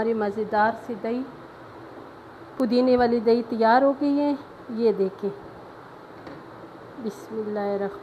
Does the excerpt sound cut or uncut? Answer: uncut